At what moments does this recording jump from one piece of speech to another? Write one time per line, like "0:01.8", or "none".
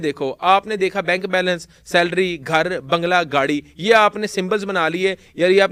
none

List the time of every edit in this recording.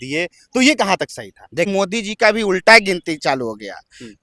0:01.7

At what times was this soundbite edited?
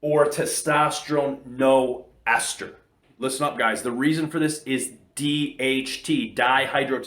0:03.0

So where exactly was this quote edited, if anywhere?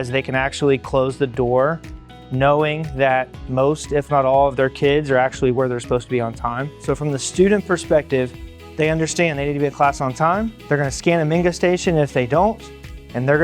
0:06.7
0:10.6

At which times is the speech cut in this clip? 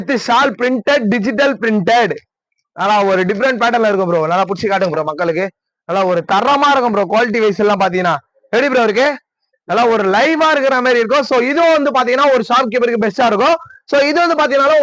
none

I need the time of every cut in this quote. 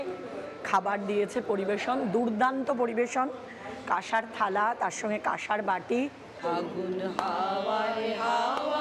0:06.3

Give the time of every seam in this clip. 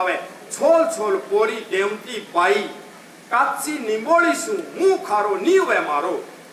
none

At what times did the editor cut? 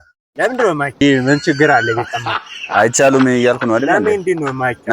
0:01.0

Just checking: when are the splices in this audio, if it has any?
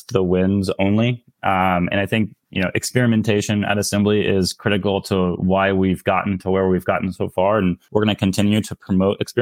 0:07.8

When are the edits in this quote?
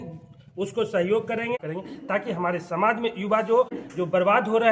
0:01.6
0:03.8

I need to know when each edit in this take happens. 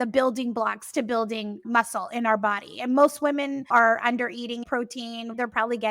0:03.6
0:04.8

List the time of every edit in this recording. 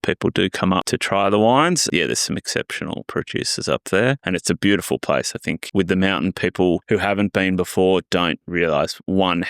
0:00.9
0:01.8
0:03.1
0:04.2
0:05.6
0:06.8

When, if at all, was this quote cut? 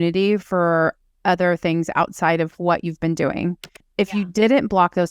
0:03.8

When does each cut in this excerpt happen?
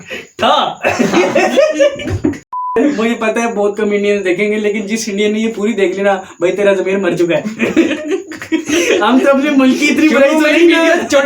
0:02.8

